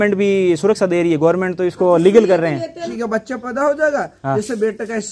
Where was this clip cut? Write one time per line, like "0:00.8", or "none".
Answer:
0:02.8